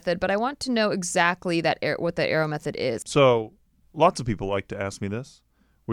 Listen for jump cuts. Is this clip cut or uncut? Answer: cut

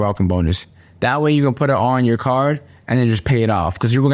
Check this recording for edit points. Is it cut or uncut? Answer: uncut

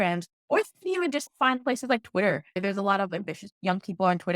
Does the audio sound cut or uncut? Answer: cut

